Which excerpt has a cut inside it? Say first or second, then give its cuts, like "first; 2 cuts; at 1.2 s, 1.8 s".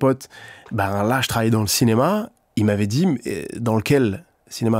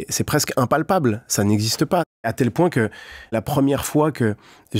second; 2 cuts; at 2.3 s, 3.3 s